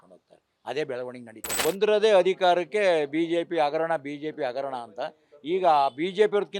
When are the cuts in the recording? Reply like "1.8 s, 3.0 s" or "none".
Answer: 1.6 s